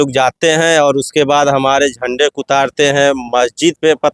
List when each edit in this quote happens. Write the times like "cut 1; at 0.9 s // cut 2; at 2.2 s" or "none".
none